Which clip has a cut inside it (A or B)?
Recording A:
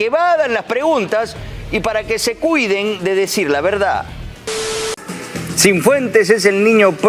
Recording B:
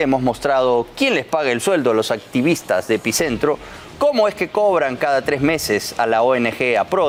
A